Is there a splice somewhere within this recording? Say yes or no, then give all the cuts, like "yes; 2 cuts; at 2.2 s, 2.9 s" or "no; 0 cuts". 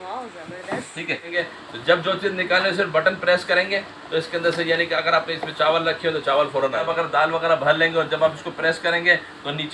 yes; 2 cuts; at 1.4 s, 6.8 s